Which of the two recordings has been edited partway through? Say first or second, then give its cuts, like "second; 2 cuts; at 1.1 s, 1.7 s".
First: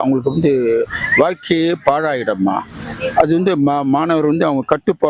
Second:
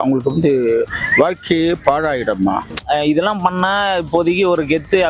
second; 1 cut; at 2.7 s